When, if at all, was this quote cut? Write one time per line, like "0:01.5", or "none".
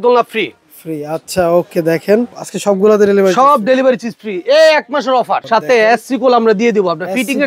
0:02.5
0:05.4